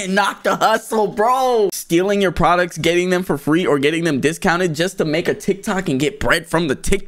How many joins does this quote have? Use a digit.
1